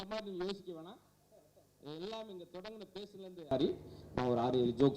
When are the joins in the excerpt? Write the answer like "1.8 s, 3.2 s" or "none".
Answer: 3.5 s